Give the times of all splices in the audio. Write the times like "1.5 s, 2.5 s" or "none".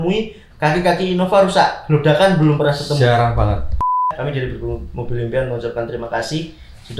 4.1 s